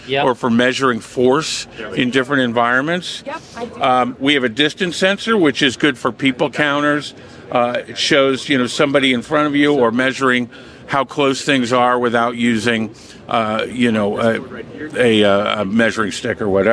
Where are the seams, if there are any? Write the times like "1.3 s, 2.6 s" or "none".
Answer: none